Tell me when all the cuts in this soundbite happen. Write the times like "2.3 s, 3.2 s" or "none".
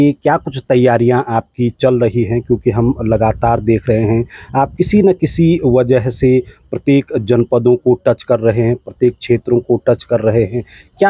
none